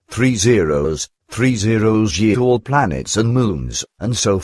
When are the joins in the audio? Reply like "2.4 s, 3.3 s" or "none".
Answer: none